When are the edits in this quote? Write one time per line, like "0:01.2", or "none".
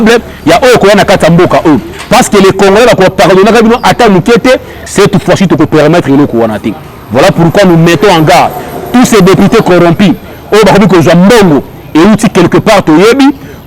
0:04.8